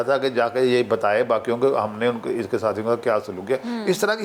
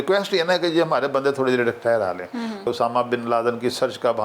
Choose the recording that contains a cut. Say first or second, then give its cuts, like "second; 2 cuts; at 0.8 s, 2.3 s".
second; 1 cut; at 2.7 s